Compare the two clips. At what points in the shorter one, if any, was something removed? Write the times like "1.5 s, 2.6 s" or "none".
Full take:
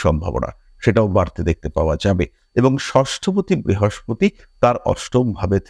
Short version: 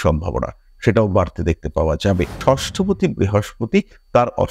2.4 s